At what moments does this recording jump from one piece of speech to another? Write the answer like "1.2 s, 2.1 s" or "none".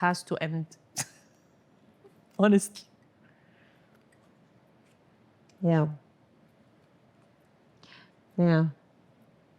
none